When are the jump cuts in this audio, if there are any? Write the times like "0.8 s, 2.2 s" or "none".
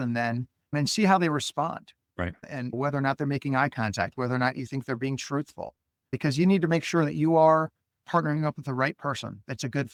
none